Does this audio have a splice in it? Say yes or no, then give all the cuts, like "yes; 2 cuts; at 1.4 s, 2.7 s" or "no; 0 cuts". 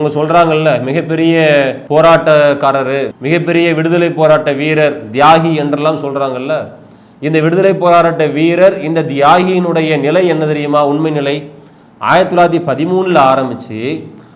yes; 2 cuts; at 1.8 s, 3.1 s